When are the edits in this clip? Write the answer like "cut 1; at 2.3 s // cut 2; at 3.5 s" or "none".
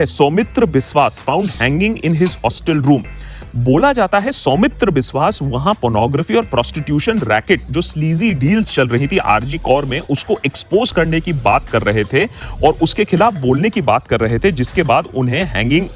none